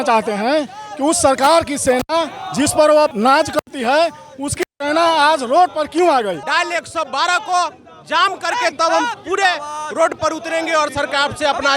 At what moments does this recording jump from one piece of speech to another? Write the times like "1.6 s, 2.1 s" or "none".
3.1 s, 6.4 s